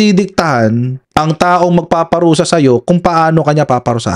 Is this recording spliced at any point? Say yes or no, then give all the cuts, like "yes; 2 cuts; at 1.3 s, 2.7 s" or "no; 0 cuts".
no; 0 cuts